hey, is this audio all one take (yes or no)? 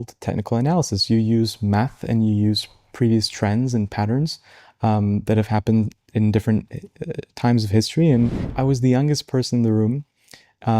no